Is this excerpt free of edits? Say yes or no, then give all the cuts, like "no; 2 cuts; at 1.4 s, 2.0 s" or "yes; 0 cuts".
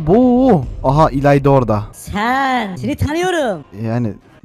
no; 2 cuts; at 2.0 s, 2.8 s